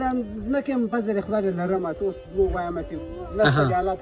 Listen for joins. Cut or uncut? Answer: uncut